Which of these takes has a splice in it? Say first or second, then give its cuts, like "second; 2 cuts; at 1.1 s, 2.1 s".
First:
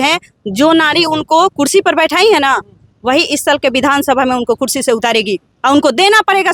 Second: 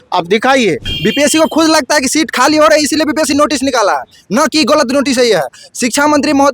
second; 1 cut; at 0.9 s